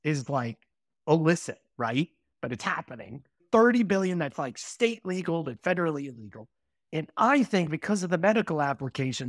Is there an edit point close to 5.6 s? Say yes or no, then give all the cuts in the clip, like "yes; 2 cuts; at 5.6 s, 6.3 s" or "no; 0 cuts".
no; 1 cut; at 3.4 s